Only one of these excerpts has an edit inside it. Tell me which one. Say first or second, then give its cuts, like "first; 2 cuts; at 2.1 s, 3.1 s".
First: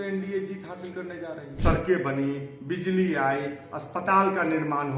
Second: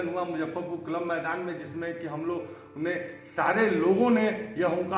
first; 1 cut; at 1.5 s